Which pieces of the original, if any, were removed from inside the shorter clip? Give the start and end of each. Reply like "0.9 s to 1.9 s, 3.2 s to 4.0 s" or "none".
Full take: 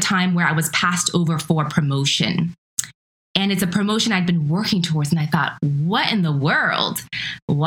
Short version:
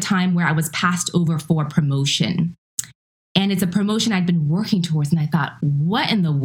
none